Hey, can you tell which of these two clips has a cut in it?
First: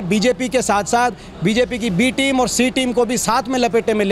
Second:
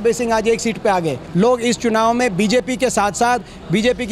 second; 1 cut; at 1.2 s

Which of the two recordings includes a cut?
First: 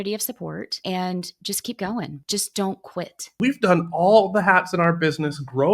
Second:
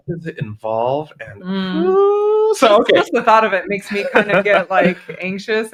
first; 3 cuts; at 0.8 s, 2.2 s, 3.3 s

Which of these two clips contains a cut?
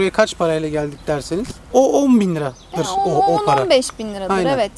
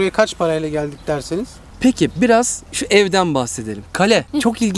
second; 1 cut; at 1.6 s

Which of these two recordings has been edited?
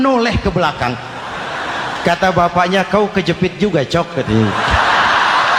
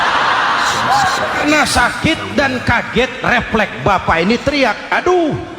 second; 1 cut; at 1.4 s

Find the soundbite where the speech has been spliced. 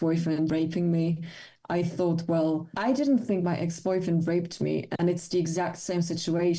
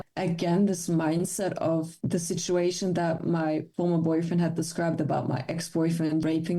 second; 2 cuts; at 2.0 s, 3.7 s

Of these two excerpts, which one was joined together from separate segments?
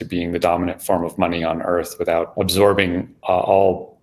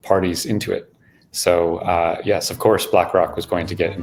first; 2 cuts; at 2.3 s, 3.1 s

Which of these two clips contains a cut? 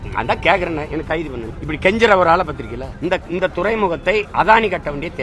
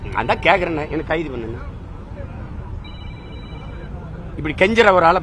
first; 2 cuts; at 1.5 s, 2.8 s

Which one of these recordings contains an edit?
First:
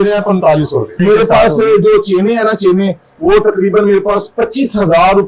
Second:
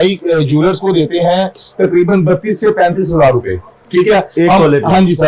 first; 1 cut; at 0.9 s

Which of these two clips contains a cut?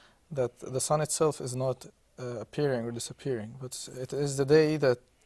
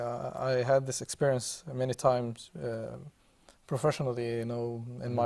second; 1 cut; at 1.6 s

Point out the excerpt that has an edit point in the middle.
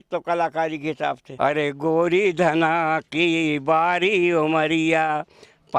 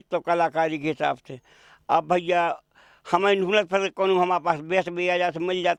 first; 1 cut; at 1.2 s

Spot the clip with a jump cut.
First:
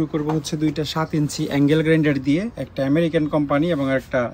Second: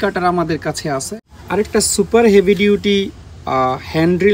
second; 1 cut; at 1.2 s

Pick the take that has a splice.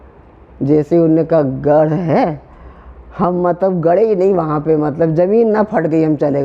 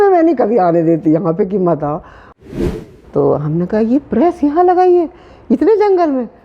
second; 1 cut; at 2.4 s

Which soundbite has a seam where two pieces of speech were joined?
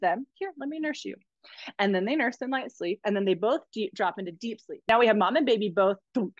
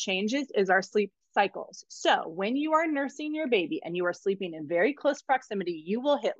first; 1 cut; at 4.9 s

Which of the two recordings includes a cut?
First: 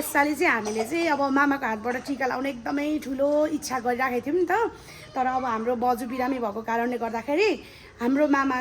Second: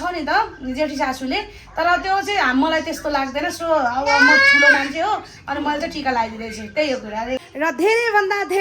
second; 1 cut; at 7.4 s

